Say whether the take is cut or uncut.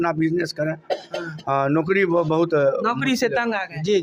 uncut